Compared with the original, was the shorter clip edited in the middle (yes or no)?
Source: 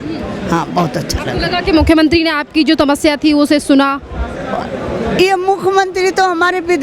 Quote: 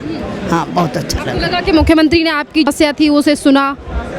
yes